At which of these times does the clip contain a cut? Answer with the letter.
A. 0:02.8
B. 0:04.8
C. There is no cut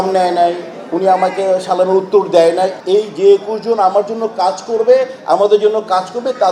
A